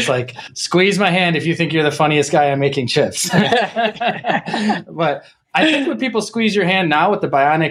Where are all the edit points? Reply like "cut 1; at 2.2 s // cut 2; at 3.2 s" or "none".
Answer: none